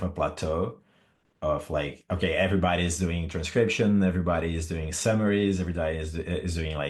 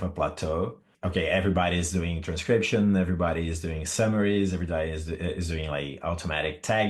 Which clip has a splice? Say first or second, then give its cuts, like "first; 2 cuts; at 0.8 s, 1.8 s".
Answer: second; 1 cut; at 0.9 s